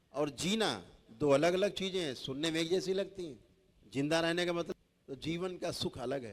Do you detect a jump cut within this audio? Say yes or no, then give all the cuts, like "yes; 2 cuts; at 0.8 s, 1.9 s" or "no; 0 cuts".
yes; 1 cut; at 4.7 s